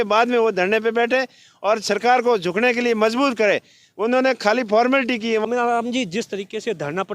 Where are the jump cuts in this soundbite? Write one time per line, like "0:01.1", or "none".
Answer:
0:05.4